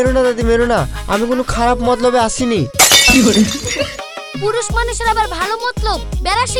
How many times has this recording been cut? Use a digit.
0